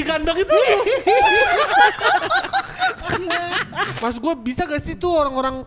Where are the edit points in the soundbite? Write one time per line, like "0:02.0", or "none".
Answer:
0:03.9